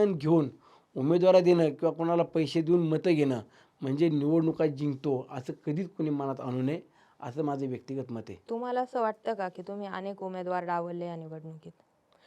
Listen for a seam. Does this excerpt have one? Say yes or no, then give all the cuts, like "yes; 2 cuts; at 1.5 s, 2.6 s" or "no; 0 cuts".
no; 0 cuts